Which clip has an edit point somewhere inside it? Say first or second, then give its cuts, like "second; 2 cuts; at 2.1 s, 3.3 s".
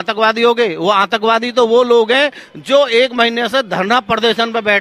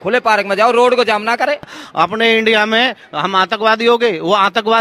second; 1 cut; at 1.8 s